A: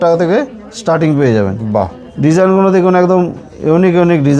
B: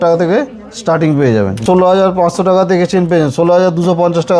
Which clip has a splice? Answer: B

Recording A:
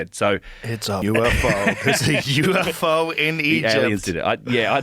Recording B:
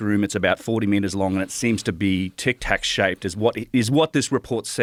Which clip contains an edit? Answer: A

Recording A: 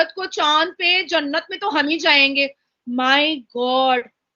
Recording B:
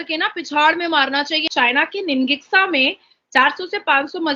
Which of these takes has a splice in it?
B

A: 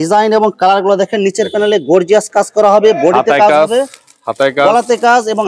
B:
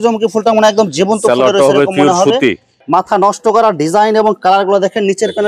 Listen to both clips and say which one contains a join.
B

